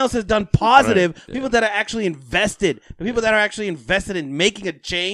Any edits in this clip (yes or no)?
yes